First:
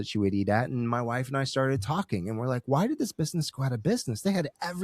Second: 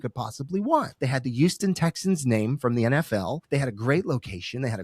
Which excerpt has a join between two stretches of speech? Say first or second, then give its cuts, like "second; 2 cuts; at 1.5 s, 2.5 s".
second; 2 cuts; at 0.9 s, 3.4 s